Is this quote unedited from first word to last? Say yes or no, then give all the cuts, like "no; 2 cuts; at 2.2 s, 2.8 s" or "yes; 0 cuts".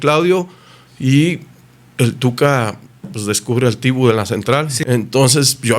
no; 1 cut; at 4.7 s